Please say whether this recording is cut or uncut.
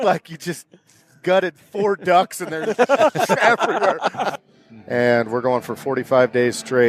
cut